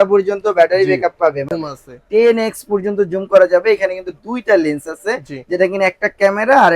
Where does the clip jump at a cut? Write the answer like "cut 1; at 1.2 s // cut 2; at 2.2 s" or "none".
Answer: cut 1; at 1.5 s